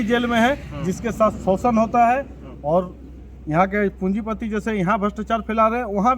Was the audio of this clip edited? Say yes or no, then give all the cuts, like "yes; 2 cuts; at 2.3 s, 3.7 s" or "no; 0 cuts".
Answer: no; 0 cuts